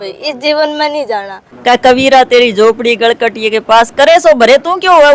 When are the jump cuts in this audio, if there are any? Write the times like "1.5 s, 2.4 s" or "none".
1.4 s